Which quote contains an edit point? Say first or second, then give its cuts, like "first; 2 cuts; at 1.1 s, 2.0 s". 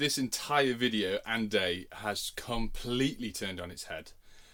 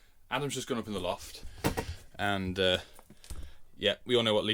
second; 1 cut; at 1.4 s